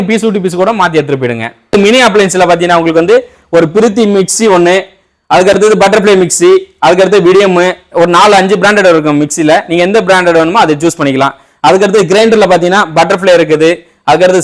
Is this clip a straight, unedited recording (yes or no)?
yes